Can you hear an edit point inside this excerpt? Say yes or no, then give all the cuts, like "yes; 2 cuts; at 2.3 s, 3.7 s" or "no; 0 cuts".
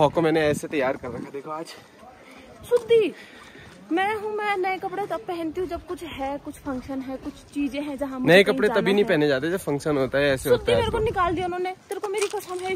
no; 0 cuts